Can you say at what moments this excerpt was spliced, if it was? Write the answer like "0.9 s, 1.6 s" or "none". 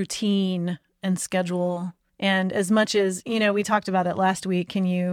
none